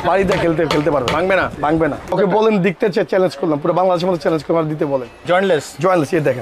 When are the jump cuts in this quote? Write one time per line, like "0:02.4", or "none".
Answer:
0:02.1
0:05.2